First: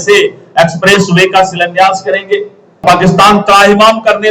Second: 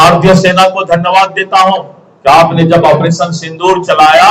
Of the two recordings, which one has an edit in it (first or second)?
first